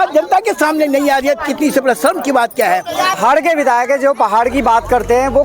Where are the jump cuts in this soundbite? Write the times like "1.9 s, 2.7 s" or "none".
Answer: 3.2 s